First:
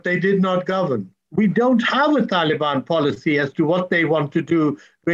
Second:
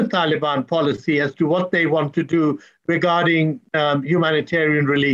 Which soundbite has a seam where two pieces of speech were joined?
first; 1 cut; at 1.2 s

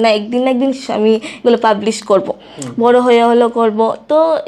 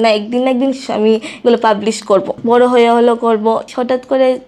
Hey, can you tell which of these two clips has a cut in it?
second; 2 cuts; at 2.3 s, 3.7 s

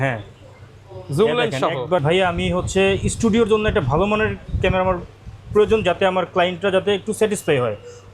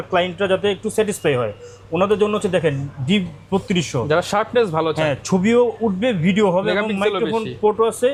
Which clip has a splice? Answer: first; 1 cut; at 2.0 s

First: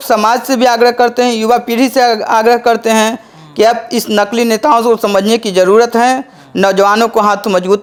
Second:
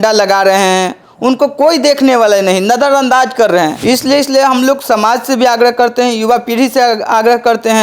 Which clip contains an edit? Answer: second; 1 cut; at 3.8 s

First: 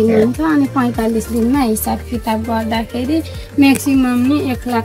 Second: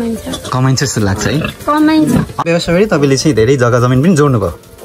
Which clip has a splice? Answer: second; 1 cut; at 2.4 s

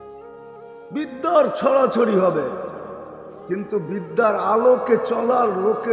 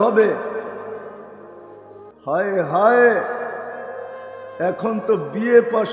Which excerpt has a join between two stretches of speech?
first; 1 cut; at 0.9 s

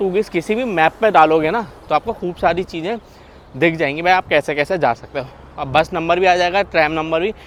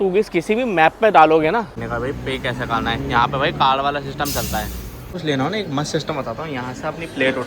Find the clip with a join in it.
second; 2 cuts; at 1.8 s, 5.2 s

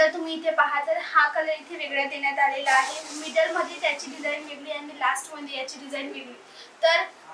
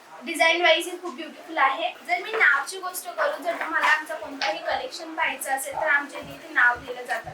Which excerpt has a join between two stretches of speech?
second; 1 cut; at 1.9 s

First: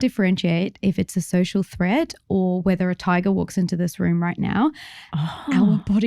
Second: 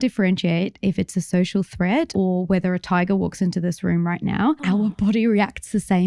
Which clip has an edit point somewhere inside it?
second; 2 cuts; at 2.1 s, 4.6 s

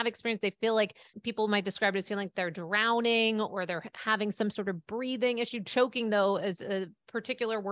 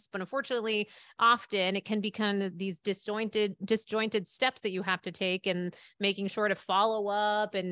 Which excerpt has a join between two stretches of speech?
first; 1 cut; at 1.1 s

